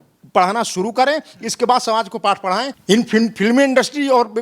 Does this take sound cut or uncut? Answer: cut